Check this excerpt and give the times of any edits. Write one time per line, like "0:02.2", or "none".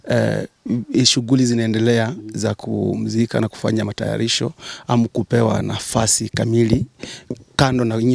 none

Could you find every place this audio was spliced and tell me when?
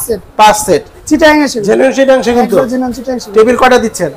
0:00.9

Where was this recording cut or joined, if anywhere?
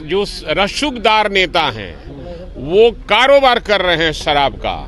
none

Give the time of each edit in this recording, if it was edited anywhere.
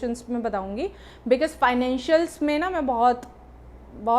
none

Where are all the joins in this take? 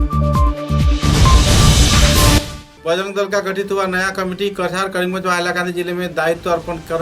0:02.4

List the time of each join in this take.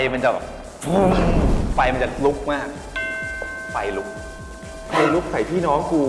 none

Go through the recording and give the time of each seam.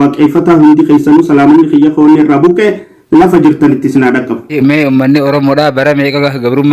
0:04.5

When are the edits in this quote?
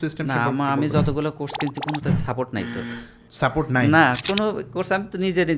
0:04.2

